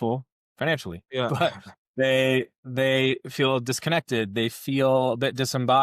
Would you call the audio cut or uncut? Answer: cut